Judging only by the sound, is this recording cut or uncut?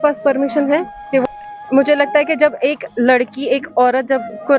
cut